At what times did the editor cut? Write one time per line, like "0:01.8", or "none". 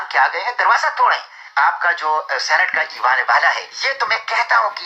0:01.4
0:03.7